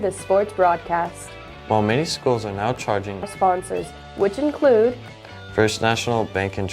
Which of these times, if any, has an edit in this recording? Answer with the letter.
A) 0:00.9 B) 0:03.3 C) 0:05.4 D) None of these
B